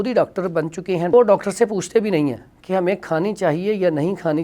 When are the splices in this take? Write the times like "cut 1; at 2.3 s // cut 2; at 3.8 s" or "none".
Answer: cut 1; at 1.1 s

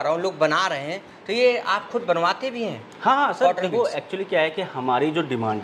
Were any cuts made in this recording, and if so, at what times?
none

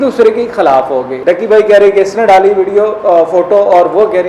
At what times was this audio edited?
cut 1; at 1.1 s

